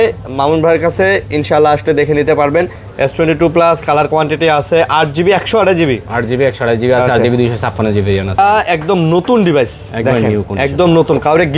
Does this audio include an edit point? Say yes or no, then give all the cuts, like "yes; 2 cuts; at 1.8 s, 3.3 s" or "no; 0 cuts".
yes; 2 cuts; at 2.8 s, 8.4 s